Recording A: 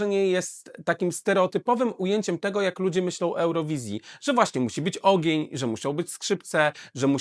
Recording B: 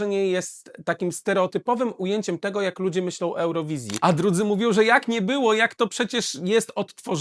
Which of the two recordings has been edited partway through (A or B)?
B